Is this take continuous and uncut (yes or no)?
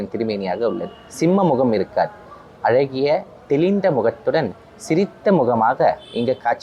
yes